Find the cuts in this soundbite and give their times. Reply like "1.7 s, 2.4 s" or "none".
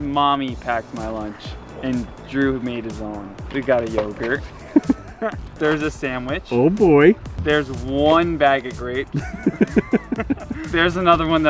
3.3 s, 5.4 s, 7.3 s, 10.6 s